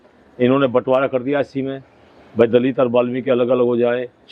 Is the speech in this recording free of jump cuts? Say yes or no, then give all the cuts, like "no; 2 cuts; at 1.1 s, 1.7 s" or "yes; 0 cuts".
yes; 0 cuts